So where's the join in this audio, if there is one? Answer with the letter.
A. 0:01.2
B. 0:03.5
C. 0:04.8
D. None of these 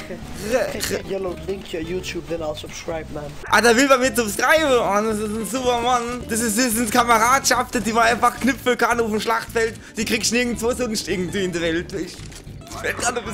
A